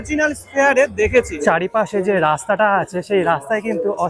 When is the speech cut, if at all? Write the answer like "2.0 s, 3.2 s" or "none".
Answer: 1.4 s